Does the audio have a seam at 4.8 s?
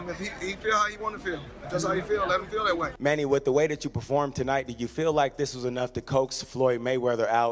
no; 1 cut; at 2.8 s

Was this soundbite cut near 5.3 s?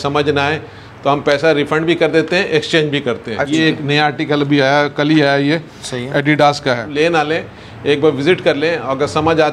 no; 2 cuts; at 3.4 s, 6.9 s

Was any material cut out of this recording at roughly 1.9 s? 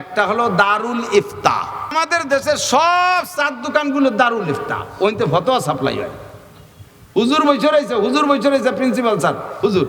yes; 1 cut; at 1.9 s

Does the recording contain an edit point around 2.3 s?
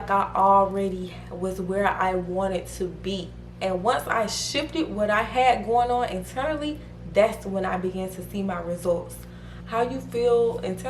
no; 2 cuts; at 3.5 s, 9.3 s

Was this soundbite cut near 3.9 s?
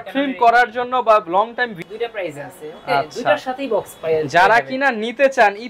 no; 1 cut; at 1.8 s

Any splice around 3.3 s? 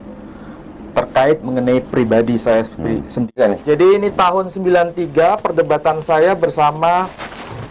yes; 1 cut; at 3.3 s

